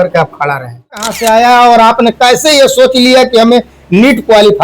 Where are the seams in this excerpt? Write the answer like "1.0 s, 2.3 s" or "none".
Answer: 1.1 s

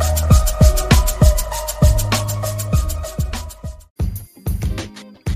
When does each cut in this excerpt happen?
3.8 s

